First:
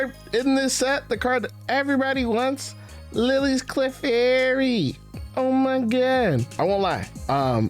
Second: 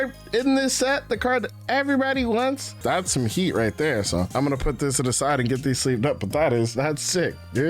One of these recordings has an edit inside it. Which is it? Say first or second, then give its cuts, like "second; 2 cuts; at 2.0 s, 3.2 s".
second; 2 cuts; at 2.8 s, 6.8 s